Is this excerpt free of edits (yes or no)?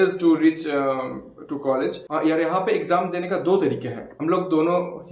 no